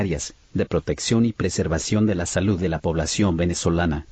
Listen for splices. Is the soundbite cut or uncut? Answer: uncut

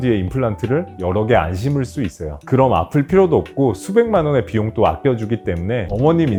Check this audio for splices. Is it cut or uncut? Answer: uncut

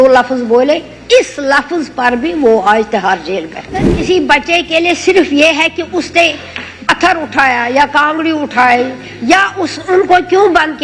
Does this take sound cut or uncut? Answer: cut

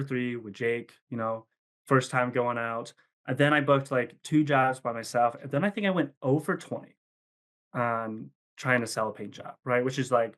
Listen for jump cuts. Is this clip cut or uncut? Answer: uncut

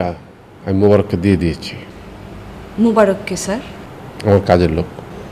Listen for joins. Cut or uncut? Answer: uncut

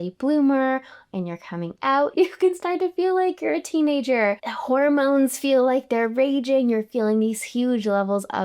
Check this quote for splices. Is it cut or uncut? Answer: cut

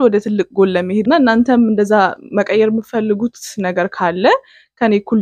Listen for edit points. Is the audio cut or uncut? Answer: cut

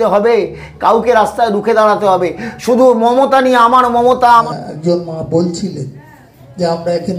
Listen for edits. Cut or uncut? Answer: cut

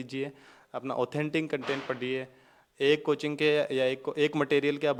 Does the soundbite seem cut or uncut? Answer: uncut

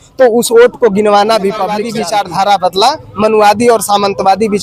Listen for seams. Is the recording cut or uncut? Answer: cut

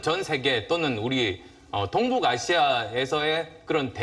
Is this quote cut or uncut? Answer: cut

